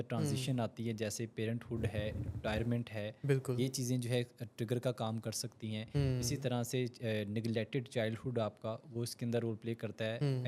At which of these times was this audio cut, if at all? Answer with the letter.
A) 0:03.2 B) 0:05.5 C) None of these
C